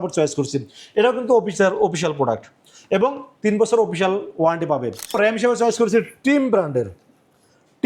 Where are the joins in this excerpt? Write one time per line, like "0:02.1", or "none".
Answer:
0:05.2